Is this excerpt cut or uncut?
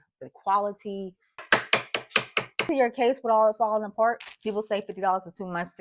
cut